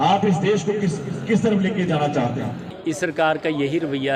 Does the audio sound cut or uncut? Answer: cut